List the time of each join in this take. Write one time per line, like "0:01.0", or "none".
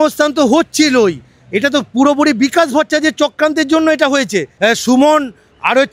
0:04.5